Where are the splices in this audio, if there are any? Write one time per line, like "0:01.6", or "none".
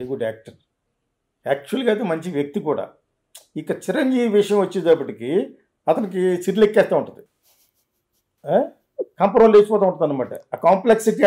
none